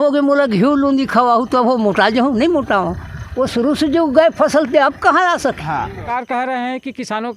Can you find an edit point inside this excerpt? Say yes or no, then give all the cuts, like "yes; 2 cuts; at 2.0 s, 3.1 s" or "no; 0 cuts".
yes; 1 cut; at 6.0 s